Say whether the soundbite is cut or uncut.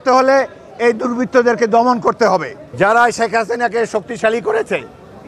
cut